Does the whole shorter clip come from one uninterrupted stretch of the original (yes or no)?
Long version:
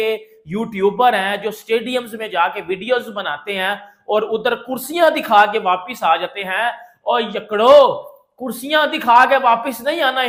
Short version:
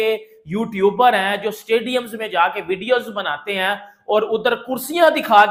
yes